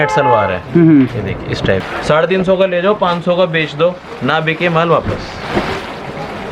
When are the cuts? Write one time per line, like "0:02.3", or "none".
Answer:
0:01.9